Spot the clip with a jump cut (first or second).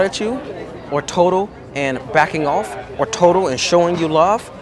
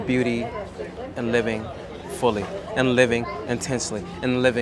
second